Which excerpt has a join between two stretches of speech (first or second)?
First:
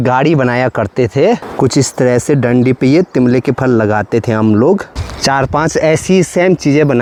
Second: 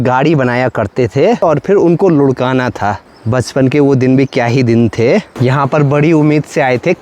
second